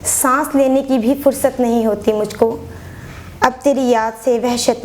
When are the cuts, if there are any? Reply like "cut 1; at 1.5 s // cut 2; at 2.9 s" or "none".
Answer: none